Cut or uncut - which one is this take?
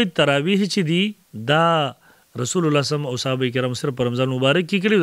cut